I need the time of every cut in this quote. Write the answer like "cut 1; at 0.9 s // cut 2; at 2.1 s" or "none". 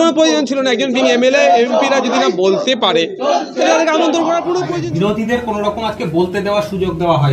cut 1; at 4.7 s